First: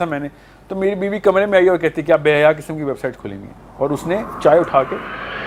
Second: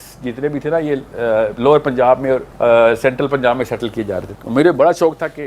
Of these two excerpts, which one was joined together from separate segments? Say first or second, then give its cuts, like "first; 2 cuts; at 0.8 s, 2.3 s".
second; 2 cuts; at 2.5 s, 4.3 s